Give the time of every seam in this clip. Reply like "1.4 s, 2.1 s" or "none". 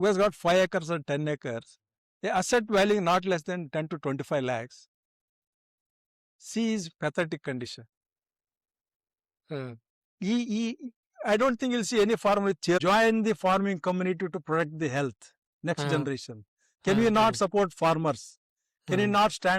12.8 s